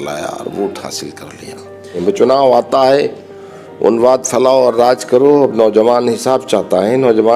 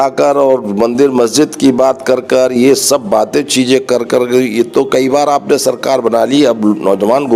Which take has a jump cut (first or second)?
first